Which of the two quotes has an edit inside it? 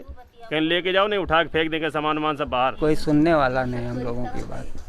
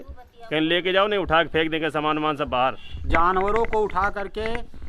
first; 1 cut; at 2.8 s

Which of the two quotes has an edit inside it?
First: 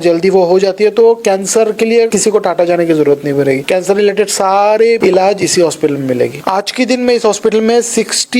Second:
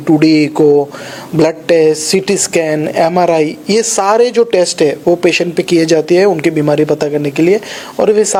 first; 4 cuts; at 2.1 s, 3.6 s, 5.0 s, 6.4 s

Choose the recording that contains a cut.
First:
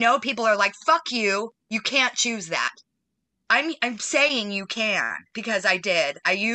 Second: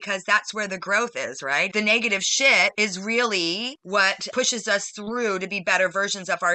second; 3 cuts; at 1.7 s, 2.7 s, 4.1 s

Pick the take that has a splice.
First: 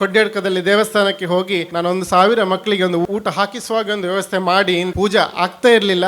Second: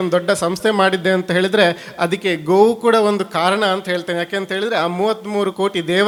first; 3 cuts; at 1.7 s, 3.0 s, 4.9 s

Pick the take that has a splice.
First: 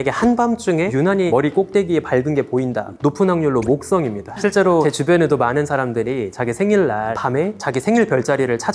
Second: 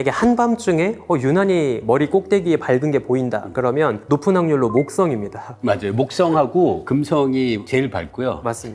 first; 4 cuts; at 1.1 s, 2.9 s, 4.7 s, 7.5 s

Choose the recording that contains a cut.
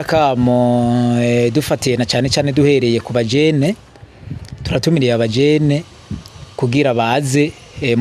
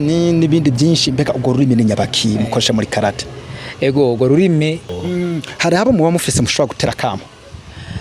second; 1 cut; at 5.0 s

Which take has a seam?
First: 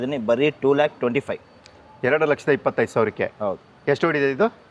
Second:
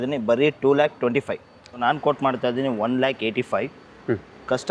second; 1 cut; at 1.7 s

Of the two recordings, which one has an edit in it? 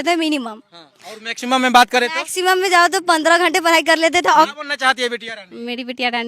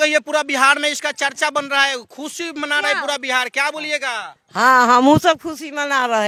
first; 1 cut; at 4.5 s

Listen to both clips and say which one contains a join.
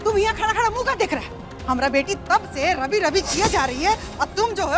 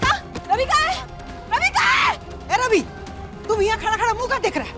second; 1 cut; at 2.3 s

